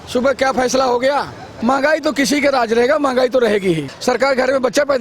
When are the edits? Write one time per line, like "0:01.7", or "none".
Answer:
0:01.5
0:03.9